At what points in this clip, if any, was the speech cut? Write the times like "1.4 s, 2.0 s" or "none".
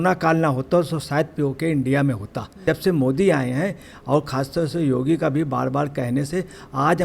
2.6 s